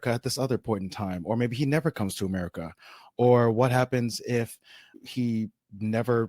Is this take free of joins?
no; 1 cut; at 4.9 s

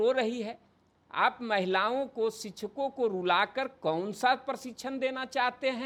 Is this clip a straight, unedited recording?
yes; 0 cuts

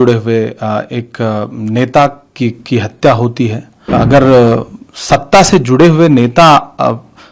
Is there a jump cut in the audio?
yes; 1 cut; at 3.9 s

